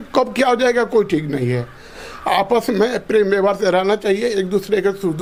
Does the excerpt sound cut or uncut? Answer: uncut